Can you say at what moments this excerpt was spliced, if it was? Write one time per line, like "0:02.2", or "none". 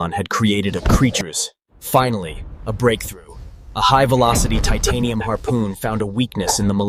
none

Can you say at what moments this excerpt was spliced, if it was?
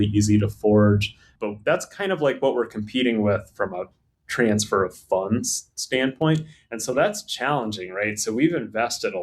0:01.2

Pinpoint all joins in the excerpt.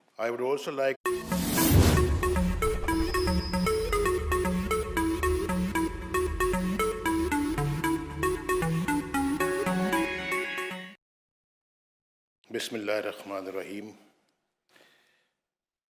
none

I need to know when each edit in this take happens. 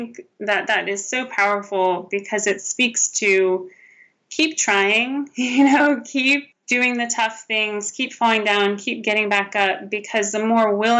0:06.5

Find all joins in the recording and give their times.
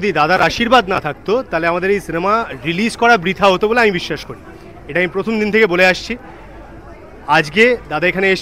none

